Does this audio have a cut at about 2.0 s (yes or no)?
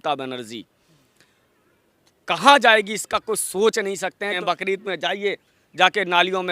no